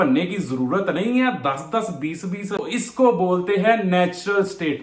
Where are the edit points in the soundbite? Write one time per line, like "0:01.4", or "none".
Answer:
0:02.6